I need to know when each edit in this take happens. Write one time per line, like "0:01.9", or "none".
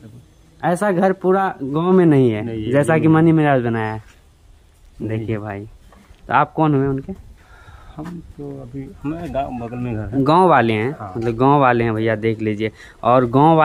none